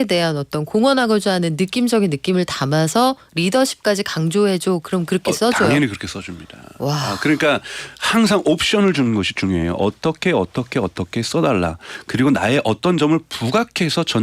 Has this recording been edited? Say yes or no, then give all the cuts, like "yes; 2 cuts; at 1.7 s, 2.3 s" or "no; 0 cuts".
no; 0 cuts